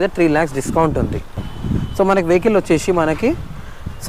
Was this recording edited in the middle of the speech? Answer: yes; 1 cut; at 1.3 s

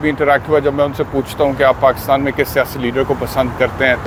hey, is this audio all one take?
yes; 0 cuts

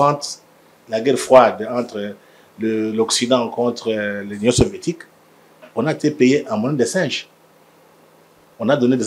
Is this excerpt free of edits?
yes; 0 cuts

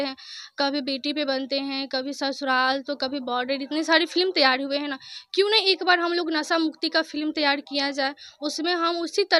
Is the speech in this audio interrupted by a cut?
no; 0 cuts

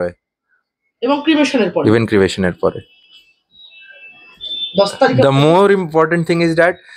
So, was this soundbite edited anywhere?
no; 0 cuts

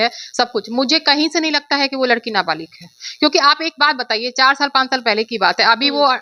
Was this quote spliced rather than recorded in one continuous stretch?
no; 0 cuts

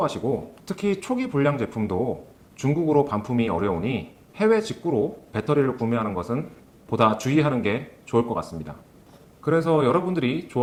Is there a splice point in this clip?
no; 0 cuts

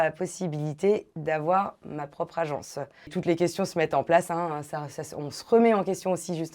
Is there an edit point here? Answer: yes; 1 cut; at 3.1 s

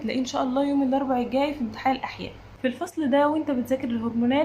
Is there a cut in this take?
yes; 1 cut; at 2.4 s

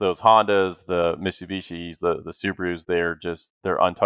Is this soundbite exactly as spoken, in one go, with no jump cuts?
yes; 0 cuts

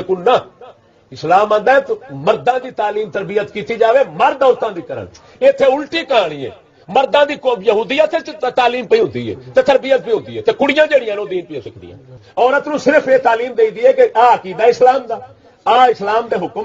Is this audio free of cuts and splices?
no; 1 cut; at 12.2 s

